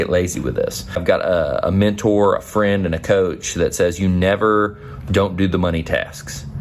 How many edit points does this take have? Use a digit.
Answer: 1